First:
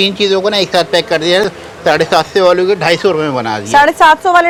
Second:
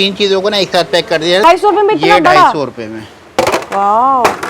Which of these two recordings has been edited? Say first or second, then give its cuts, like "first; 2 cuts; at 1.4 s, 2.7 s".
second; 1 cut; at 1.4 s